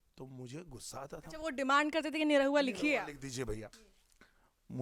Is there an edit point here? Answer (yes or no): no